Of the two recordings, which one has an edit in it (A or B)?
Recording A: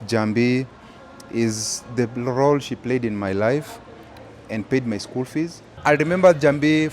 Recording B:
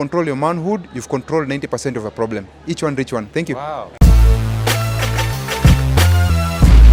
A